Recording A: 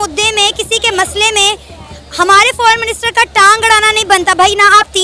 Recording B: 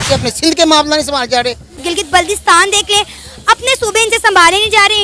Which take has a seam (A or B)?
B